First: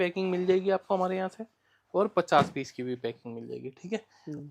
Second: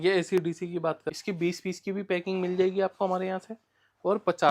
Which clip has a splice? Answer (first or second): second